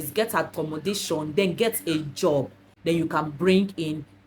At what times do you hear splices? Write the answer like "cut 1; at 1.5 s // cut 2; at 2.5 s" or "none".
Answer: cut 1; at 2.7 s